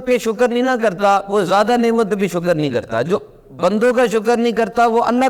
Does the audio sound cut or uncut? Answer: uncut